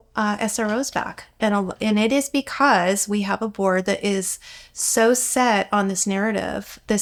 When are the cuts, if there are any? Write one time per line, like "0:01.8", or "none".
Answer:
none